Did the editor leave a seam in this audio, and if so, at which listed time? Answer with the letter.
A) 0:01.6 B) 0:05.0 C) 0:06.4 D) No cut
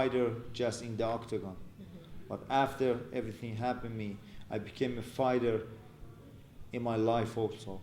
D